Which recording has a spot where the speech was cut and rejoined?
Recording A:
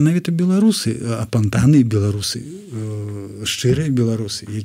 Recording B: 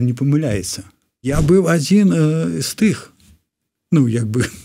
B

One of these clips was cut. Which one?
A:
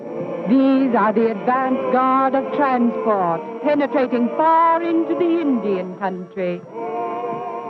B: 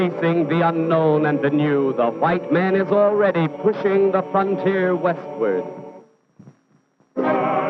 A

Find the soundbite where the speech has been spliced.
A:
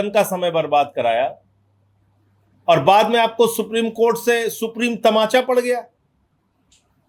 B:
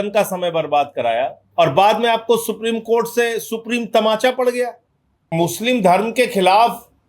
B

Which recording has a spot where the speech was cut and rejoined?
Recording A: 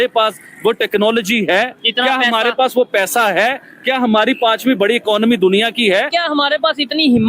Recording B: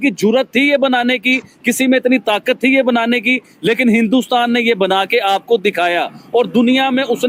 A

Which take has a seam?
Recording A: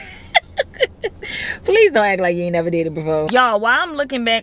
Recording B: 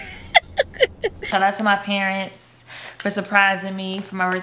B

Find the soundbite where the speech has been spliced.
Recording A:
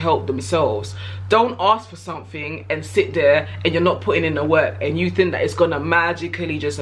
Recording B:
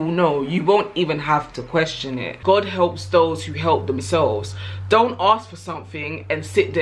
B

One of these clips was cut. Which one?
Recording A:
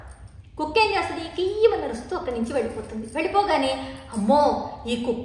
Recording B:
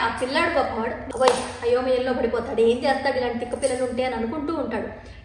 B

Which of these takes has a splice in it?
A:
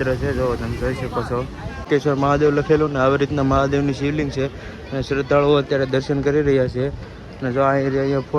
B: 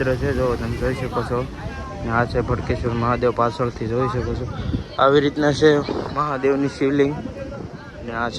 A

